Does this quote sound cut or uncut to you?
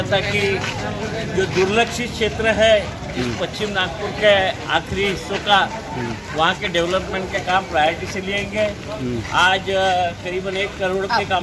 uncut